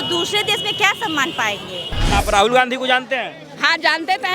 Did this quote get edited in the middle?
yes; 1 cut; at 2.1 s

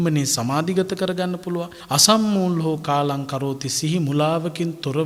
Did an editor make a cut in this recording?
no; 0 cuts

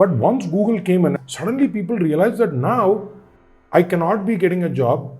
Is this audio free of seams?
no; 1 cut; at 1.2 s

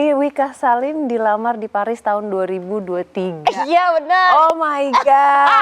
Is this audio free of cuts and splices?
yes; 0 cuts

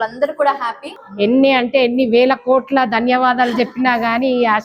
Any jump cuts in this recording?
yes; 1 cut; at 1.0 s

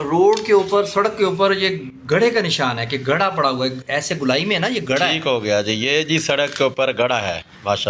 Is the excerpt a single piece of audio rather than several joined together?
yes; 0 cuts

